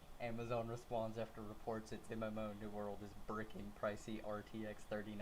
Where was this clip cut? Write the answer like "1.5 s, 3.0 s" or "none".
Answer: none